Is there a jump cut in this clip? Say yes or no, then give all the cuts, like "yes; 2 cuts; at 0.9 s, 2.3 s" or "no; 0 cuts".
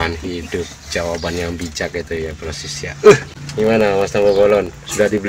yes; 1 cut; at 3.4 s